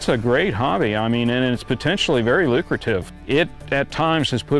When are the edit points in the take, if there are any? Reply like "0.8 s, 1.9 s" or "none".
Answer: 3.1 s